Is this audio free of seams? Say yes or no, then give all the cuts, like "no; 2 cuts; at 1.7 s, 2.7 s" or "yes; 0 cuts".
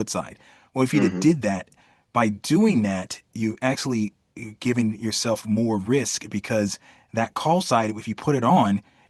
yes; 0 cuts